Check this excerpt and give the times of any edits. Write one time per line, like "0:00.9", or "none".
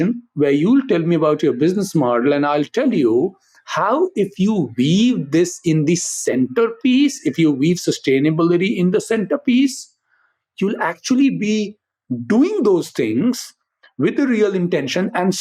none